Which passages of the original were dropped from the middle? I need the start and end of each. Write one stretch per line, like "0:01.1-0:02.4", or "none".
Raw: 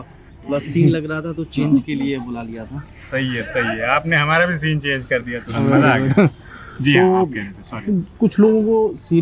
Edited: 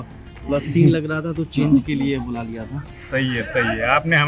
none